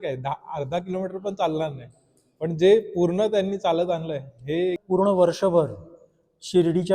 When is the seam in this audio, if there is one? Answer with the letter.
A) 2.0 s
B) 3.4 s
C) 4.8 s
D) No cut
C